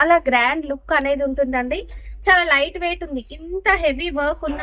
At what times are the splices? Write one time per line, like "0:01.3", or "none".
none